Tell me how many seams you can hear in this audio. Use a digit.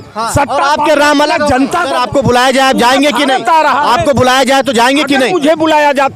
1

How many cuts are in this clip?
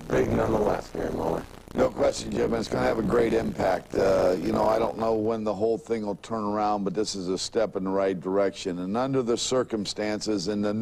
1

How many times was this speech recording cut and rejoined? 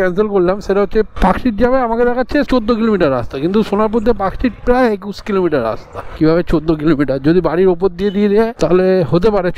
1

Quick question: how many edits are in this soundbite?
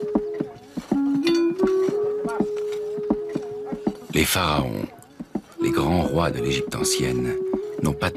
0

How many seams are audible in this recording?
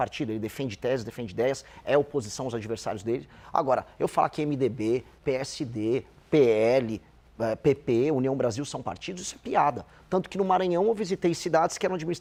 0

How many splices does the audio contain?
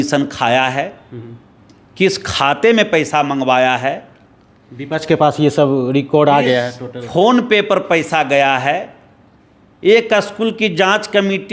0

